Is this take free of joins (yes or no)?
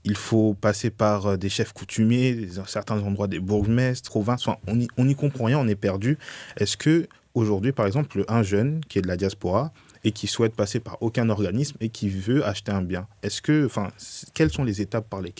no